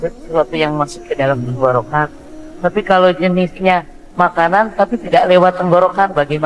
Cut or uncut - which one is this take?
uncut